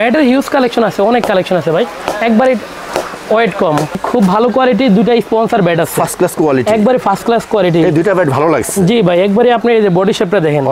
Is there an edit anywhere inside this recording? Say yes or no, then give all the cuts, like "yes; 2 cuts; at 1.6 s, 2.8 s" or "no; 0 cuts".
yes; 1 cut; at 4.0 s